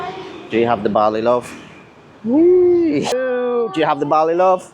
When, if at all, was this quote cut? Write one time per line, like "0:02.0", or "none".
0:03.2